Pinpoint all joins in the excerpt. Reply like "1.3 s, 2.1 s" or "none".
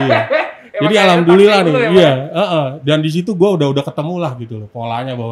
none